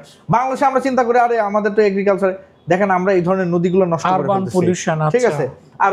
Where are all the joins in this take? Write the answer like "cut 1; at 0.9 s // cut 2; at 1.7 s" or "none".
none